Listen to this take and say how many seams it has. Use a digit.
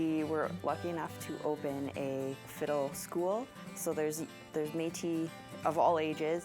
1